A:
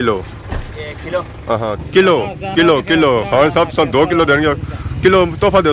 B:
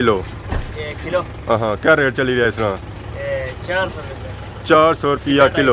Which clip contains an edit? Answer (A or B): A